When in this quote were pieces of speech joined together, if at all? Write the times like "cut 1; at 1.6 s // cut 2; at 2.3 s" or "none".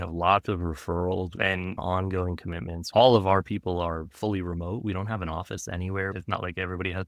cut 1; at 1.5 s // cut 2; at 2.8 s

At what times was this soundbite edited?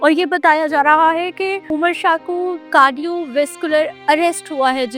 cut 1; at 1.7 s // cut 2; at 2.7 s // cut 3; at 3.9 s

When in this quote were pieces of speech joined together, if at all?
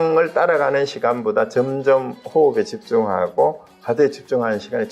none

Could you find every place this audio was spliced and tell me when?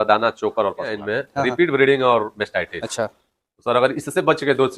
cut 1; at 1.1 s

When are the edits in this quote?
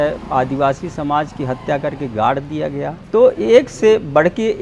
cut 1; at 3.0 s

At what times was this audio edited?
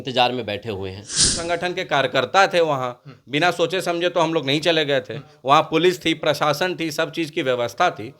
cut 1; at 1.4 s

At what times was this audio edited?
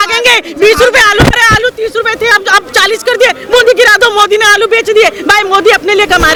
none

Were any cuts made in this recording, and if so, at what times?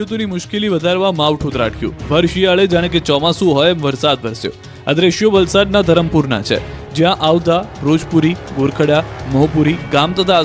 none

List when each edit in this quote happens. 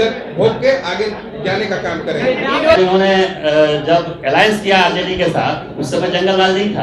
cut 1; at 2.8 s

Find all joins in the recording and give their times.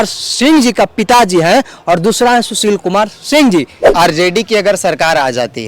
cut 1; at 3.8 s

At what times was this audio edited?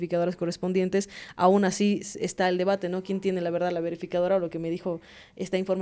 none

